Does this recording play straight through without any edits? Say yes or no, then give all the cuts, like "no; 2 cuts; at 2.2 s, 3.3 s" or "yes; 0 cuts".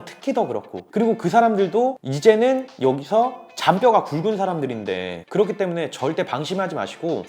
no; 1 cut; at 5.1 s